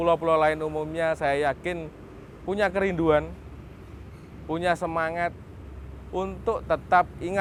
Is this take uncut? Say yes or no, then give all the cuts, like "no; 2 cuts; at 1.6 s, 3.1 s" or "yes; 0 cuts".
yes; 0 cuts